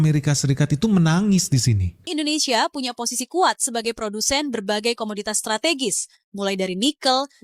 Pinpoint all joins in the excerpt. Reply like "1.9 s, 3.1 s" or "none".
2.1 s